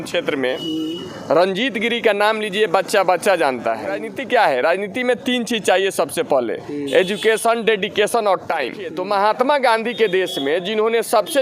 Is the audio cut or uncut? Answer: cut